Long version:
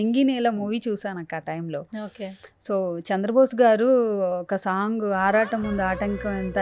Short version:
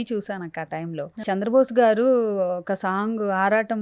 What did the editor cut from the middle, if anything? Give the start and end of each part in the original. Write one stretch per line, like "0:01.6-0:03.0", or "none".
0:02.0-0:03.0